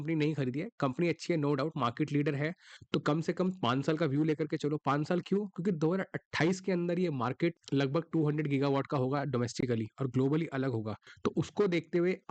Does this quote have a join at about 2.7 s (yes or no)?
yes